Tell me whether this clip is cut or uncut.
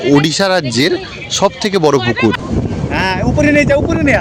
cut